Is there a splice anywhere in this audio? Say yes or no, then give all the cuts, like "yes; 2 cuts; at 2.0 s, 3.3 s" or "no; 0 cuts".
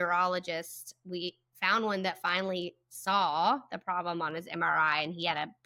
no; 0 cuts